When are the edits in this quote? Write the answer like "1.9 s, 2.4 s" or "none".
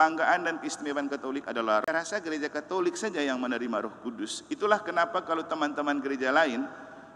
1.8 s